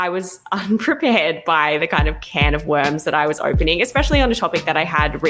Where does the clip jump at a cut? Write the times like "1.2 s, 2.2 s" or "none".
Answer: none